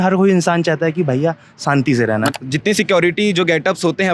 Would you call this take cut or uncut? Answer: cut